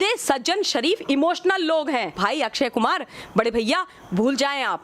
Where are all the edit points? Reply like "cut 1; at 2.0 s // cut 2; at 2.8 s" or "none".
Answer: cut 1; at 2.1 s

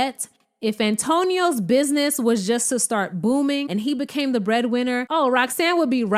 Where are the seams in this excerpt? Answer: cut 1; at 3.6 s // cut 2; at 5.1 s

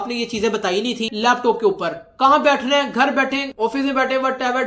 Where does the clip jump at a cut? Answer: cut 1; at 1.1 s

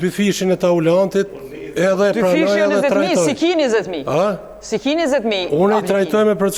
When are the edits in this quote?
none

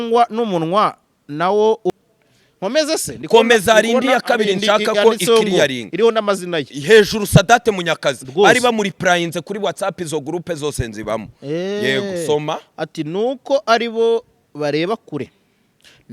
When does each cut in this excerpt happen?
cut 1; at 1.9 s

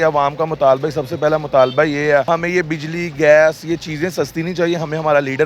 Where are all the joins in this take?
cut 1; at 2.2 s

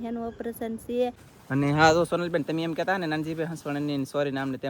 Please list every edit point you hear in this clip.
cut 1; at 1.3 s

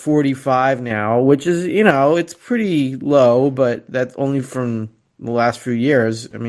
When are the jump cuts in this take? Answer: none

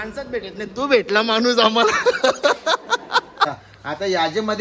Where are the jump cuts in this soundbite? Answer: cut 1; at 3.6 s

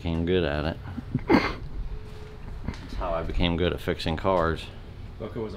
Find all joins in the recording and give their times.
none

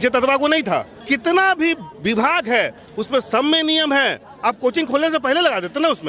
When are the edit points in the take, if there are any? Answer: cut 1; at 0.9 s

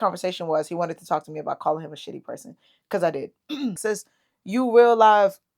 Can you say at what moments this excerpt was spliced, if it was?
cut 1; at 3.8 s

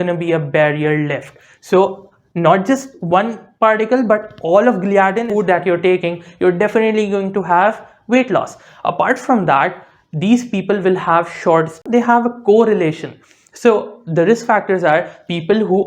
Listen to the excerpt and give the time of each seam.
cut 1; at 5.2 s // cut 2; at 11.8 s

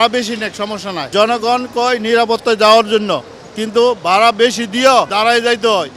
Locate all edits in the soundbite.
none

